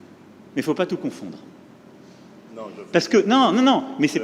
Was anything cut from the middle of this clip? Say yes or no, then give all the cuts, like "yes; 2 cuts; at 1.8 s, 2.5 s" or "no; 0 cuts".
no; 0 cuts